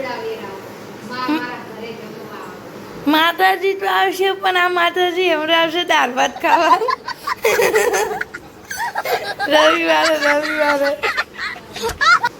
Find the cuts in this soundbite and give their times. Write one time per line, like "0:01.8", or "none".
0:11.0